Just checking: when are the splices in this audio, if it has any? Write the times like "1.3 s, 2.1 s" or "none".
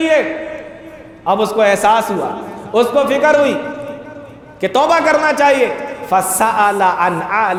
none